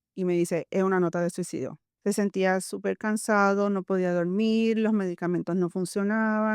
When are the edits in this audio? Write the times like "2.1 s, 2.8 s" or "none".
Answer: 1.8 s

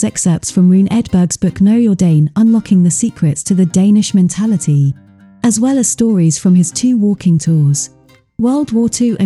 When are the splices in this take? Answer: none

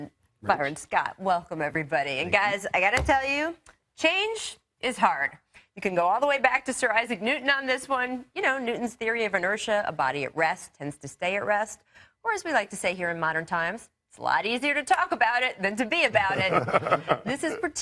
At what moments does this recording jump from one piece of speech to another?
none

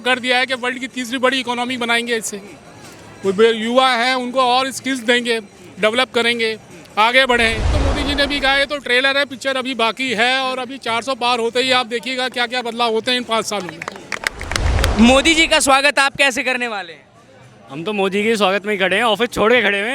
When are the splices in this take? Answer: 7.7 s, 14.9 s

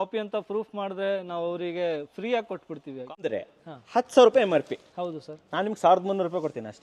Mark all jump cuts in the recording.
3.0 s

